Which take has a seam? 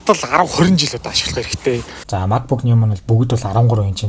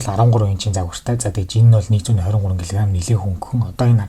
first; 1 cut; at 2.0 s

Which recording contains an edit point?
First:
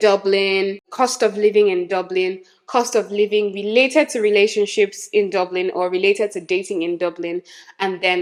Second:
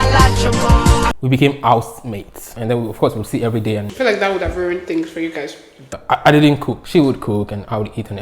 second; 4 cuts; at 1.1 s, 2.4 s, 5.9 s, 6.8 s

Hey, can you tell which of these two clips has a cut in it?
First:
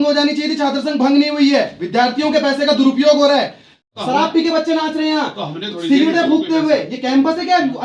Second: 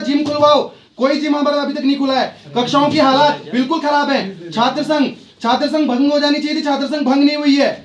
first; 1 cut; at 3.9 s

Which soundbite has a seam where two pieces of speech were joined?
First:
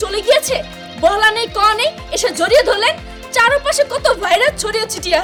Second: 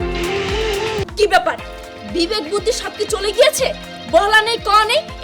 second; 1 cut; at 1.0 s

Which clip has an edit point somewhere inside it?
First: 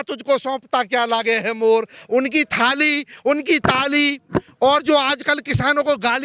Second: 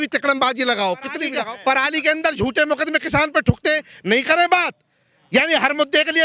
second; 1 cut; at 1.3 s

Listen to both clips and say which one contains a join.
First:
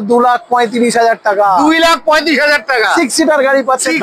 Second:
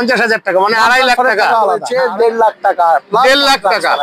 second; 1 cut; at 1.9 s

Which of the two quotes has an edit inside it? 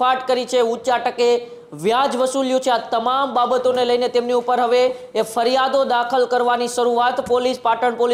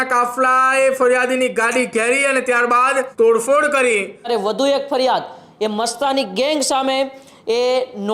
second; 2 cuts; at 3.1 s, 4.3 s

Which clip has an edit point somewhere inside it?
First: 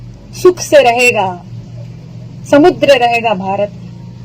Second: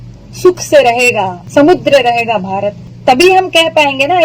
second; 2 cuts; at 1.4 s, 2.8 s

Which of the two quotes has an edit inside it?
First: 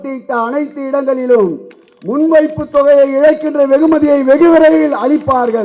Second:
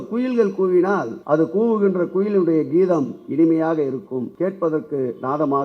second; 2 cuts; at 1.1 s, 4.3 s

